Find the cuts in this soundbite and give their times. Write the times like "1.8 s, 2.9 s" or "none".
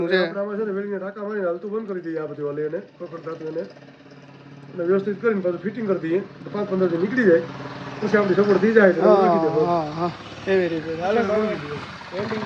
none